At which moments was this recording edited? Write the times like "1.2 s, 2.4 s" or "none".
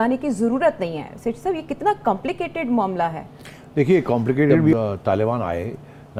none